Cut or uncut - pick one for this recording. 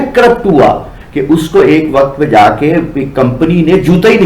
cut